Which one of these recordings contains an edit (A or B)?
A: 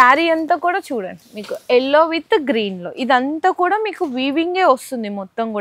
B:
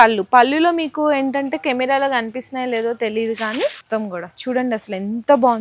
B